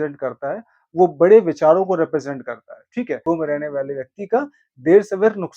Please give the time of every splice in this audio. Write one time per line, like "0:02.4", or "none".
0:03.2